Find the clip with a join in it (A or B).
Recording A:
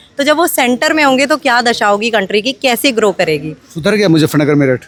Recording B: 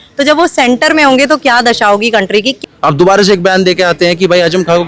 B